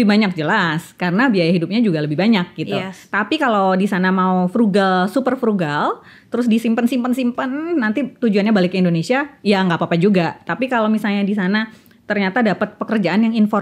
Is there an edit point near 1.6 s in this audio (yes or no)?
no